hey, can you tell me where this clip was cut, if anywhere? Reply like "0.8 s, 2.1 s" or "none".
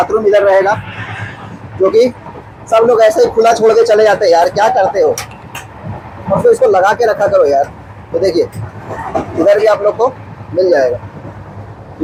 none